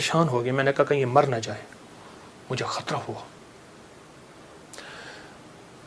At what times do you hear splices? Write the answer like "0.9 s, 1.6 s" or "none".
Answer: none